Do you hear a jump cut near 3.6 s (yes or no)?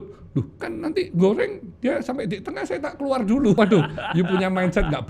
yes